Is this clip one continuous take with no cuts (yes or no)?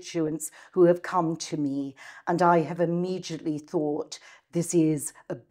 yes